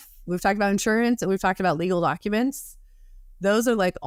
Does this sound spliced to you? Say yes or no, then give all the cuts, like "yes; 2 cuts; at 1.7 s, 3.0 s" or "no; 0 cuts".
no; 0 cuts